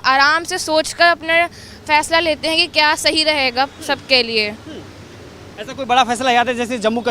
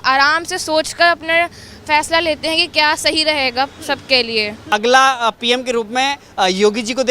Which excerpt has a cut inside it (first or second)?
second